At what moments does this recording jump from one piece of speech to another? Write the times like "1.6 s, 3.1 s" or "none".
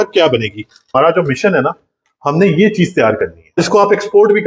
0.9 s, 3.6 s